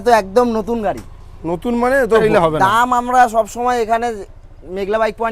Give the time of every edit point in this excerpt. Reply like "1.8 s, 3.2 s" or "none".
2.2 s